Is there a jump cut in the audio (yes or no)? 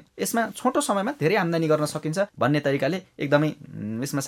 no